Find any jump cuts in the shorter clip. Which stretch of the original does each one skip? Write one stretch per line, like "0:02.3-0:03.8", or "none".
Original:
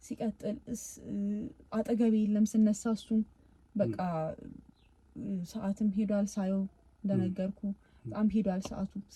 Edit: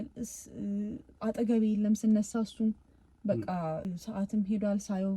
0:04.3-0:05.3